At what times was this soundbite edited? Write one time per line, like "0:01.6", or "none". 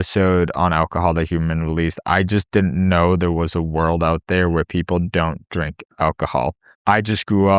0:06.7

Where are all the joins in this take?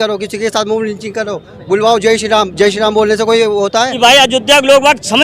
0:04.0

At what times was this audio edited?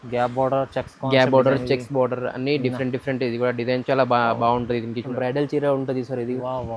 0:05.1

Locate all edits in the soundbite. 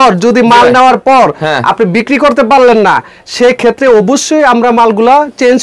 none

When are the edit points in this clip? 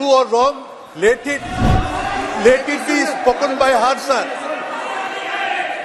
0:01.4

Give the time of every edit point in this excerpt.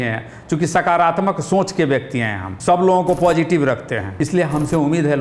0:02.5
0:04.1

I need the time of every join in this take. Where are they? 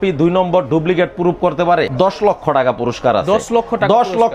0:01.9

